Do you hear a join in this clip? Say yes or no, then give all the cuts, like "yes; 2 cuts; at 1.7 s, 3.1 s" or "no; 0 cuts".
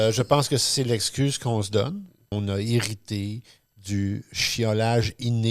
yes; 1 cut; at 2.2 s